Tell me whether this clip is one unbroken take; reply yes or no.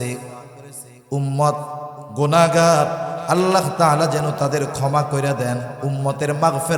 yes